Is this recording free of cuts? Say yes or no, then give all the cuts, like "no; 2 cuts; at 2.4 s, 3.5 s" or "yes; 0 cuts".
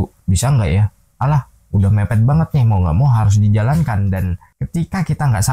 no; 1 cut; at 4.5 s